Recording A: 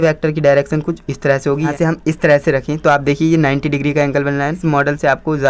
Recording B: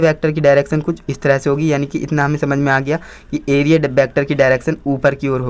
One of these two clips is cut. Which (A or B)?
A